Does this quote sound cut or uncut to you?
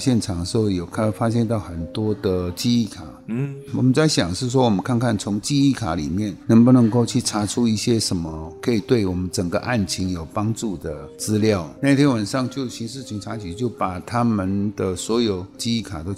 uncut